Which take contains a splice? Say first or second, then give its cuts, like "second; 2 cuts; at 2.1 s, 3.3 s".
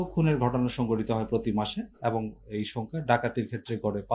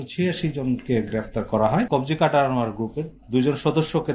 second; 1 cut; at 1.9 s